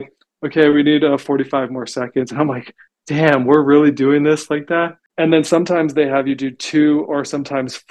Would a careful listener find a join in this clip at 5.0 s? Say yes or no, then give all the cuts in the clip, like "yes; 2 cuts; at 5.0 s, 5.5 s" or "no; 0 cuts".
yes; 1 cut; at 5.0 s